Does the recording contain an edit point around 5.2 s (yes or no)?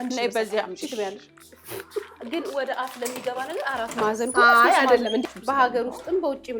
yes